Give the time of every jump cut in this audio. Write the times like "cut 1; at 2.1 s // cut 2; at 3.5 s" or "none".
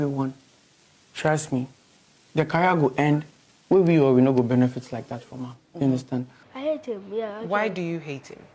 cut 1; at 6.4 s